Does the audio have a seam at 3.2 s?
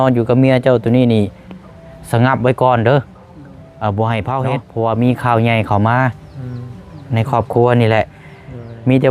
no; 1 cut; at 4.6 s

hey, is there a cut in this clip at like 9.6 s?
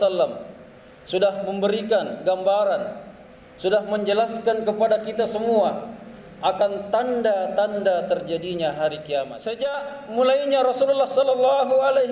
yes; 1 cut; at 9.6 s

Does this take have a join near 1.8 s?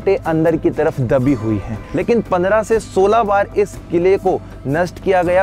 yes; 1 cut; at 1.8 s

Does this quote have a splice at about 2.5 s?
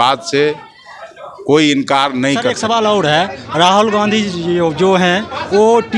yes; 1 cut; at 2.5 s

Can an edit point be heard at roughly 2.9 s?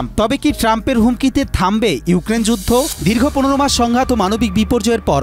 yes; 1 cut; at 2.9 s

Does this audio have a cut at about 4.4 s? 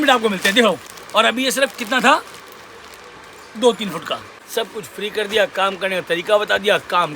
yes; 2 cuts; at 0.9 s, 4.4 s

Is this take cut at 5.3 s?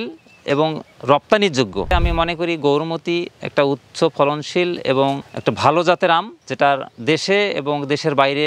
yes; 2 cuts; at 1.9 s, 5.3 s

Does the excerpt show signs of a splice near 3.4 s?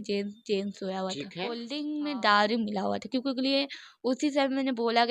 no; 1 cut; at 1.7 s

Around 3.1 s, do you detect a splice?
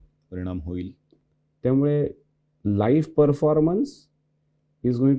no; 1 cut; at 1.1 s

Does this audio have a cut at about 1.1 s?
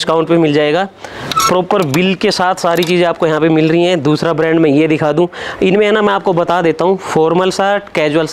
no; 0 cuts

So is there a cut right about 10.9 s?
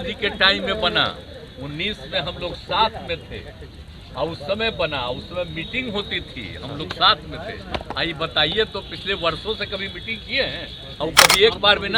yes; 1 cut; at 10.9 s

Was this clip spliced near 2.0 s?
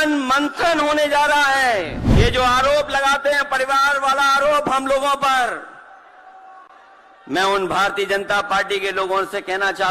yes; 1 cut; at 2.0 s

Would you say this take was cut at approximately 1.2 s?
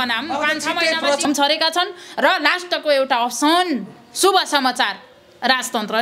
yes; 1 cut; at 1.2 s

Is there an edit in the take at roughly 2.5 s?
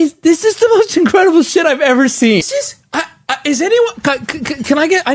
yes; 1 cut; at 2.5 s

